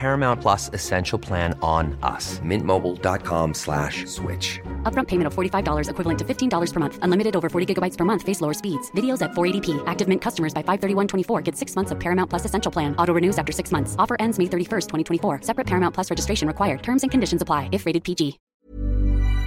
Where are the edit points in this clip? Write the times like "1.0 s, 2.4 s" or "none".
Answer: 18.5 s